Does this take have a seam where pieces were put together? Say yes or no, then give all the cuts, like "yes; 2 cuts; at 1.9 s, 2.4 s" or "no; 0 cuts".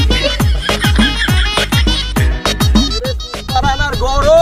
no; 0 cuts